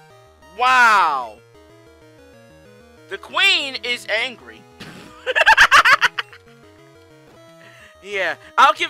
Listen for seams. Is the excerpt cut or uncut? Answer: uncut